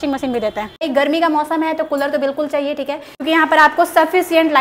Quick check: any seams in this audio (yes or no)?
yes